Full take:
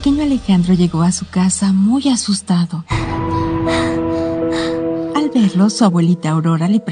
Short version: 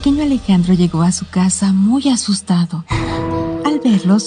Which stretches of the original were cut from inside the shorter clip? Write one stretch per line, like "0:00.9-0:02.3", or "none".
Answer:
0:03.2-0:04.7